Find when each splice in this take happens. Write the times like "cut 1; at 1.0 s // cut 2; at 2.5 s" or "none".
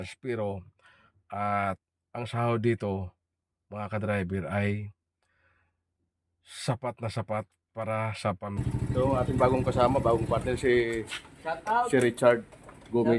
cut 1; at 8.6 s